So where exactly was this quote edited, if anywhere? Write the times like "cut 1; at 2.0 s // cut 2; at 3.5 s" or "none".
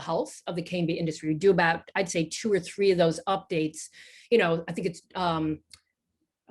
none